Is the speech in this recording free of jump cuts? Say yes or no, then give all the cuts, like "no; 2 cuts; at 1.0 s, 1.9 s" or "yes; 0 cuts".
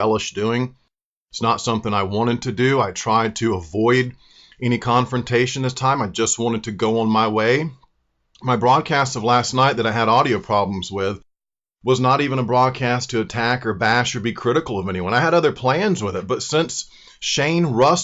yes; 0 cuts